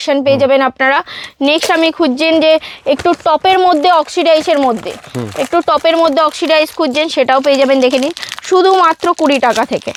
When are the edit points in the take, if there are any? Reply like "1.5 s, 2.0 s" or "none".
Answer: none

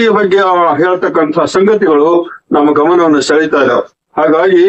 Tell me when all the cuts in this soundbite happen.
none

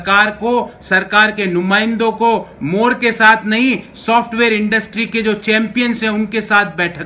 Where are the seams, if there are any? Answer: none

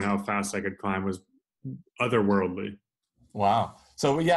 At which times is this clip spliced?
none

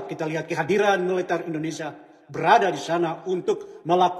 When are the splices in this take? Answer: none

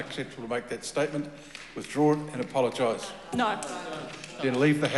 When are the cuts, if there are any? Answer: none

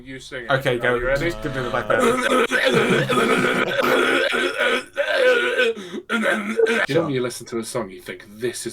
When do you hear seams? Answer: 6.8 s

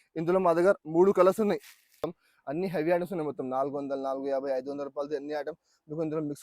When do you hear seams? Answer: 2.0 s

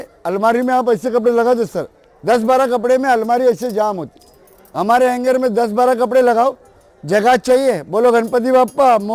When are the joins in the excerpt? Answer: none

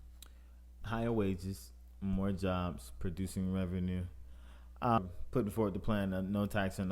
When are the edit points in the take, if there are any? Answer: 5.0 s

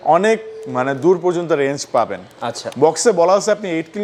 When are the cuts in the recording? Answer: none

